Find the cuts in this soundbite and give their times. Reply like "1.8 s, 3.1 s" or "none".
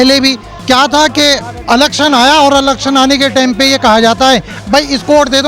none